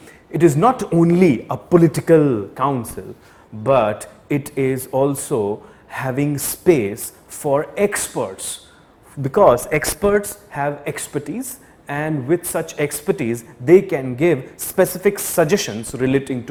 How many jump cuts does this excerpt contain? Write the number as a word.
zero